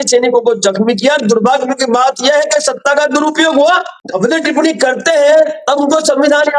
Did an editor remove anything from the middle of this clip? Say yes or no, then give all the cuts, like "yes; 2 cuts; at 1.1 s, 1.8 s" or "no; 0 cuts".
yes; 1 cut; at 3.9 s